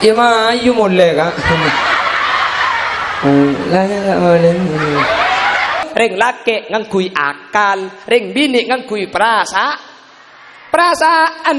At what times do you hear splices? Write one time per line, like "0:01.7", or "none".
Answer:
0:05.8